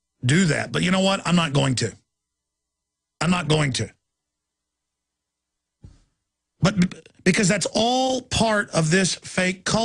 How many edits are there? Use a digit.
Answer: 0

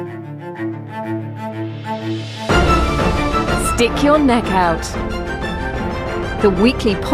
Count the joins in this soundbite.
0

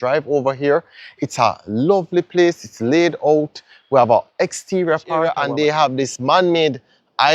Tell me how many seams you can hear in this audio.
1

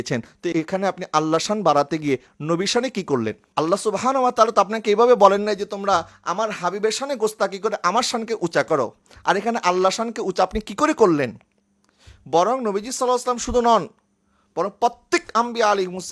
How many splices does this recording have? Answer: 0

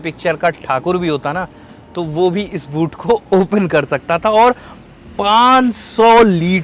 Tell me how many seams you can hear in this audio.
0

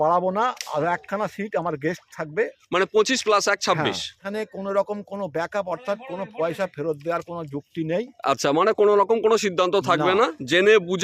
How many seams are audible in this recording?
1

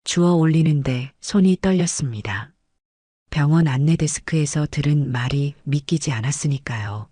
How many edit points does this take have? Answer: 0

